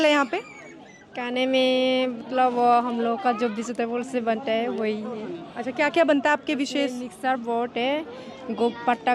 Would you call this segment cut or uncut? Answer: uncut